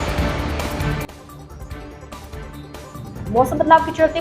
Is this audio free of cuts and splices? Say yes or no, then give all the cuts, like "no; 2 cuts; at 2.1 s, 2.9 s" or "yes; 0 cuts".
no; 1 cut; at 2.8 s